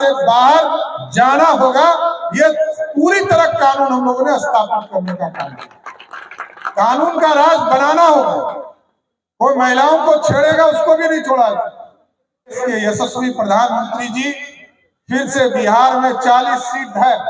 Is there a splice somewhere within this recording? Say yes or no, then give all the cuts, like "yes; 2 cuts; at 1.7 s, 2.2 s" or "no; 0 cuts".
yes; 1 cut; at 12.6 s